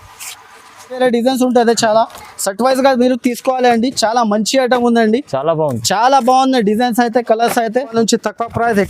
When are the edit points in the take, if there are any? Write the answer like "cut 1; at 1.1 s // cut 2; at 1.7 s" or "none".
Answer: cut 1; at 1.0 s // cut 2; at 7.9 s